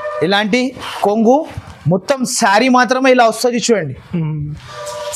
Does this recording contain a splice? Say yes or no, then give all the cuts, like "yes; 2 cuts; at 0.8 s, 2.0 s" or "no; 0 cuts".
no; 0 cuts